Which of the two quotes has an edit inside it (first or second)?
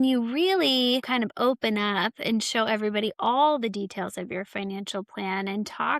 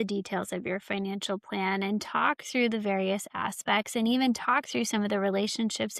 first